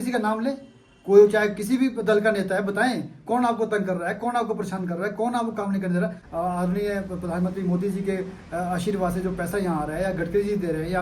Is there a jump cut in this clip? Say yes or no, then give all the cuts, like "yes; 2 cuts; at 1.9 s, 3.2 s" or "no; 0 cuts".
yes; 1 cut; at 6.2 s